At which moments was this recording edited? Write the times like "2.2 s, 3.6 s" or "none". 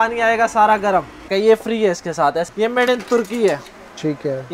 1.3 s, 2.5 s